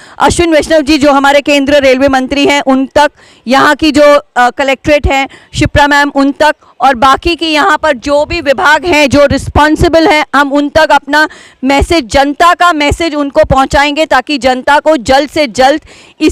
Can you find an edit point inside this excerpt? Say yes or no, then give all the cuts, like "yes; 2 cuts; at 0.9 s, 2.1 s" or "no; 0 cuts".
no; 0 cuts